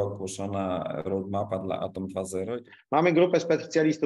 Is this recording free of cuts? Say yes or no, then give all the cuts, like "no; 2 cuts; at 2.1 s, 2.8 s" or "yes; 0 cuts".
no; 1 cut; at 2.7 s